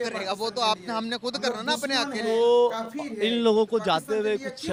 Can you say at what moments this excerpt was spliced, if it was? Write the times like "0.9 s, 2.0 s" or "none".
none